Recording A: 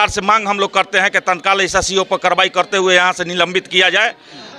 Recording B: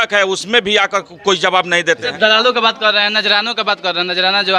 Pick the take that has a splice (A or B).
B